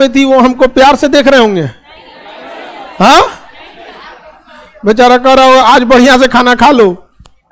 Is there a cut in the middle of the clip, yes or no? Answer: no